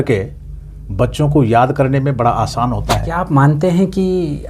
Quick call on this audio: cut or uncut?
cut